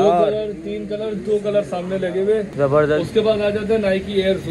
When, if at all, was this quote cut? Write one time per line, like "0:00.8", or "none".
0:02.5